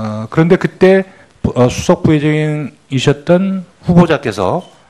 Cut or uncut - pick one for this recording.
uncut